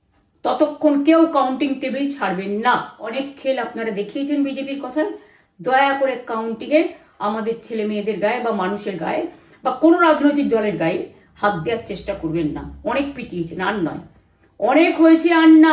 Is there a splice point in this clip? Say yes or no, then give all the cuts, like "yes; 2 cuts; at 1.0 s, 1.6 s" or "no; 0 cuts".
yes; 1 cut; at 3.3 s